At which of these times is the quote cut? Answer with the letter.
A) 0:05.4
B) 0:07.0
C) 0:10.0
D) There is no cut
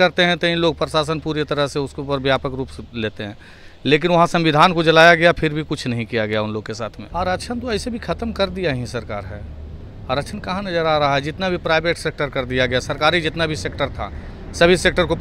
B